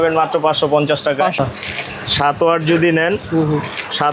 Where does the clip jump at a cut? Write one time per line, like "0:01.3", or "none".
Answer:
0:01.4